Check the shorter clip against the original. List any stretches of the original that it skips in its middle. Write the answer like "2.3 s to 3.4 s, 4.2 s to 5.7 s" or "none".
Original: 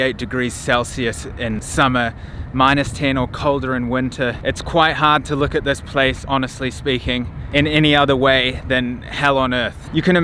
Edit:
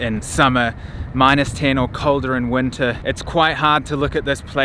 none